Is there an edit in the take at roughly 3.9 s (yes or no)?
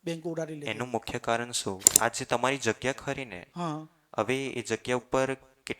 no